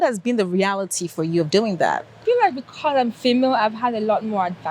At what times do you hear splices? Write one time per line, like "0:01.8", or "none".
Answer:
0:02.2